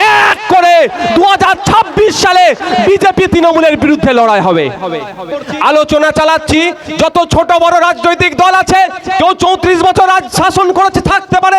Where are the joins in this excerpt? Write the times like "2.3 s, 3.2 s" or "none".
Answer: 5.4 s